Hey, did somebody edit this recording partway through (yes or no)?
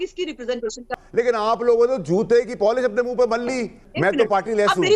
yes